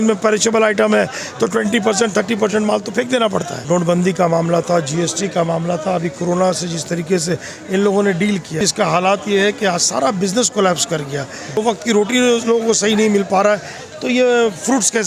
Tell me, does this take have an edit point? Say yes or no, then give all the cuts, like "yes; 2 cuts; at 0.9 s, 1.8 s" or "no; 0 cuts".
yes; 3 cuts; at 3.5 s, 8.6 s, 11.6 s